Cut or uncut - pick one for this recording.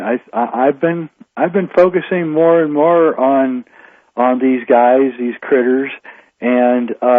cut